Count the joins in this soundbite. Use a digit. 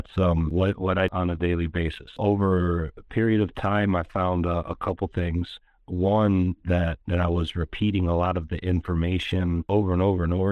3